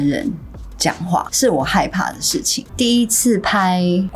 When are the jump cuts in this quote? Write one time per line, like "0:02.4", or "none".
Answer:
0:01.3
0:02.6